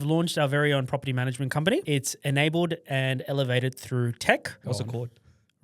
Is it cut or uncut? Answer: cut